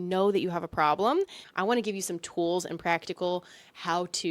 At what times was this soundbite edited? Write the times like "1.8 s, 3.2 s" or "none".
1.4 s